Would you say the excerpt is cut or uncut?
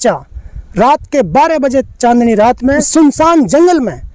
cut